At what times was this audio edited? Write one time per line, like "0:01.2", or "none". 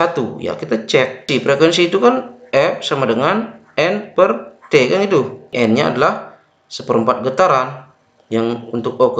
0:01.3
0:05.5